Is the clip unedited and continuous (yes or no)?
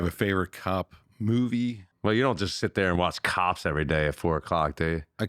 no